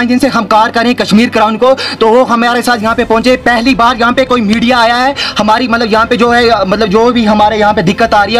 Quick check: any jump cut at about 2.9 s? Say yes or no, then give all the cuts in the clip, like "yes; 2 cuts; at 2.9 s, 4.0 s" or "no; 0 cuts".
no; 0 cuts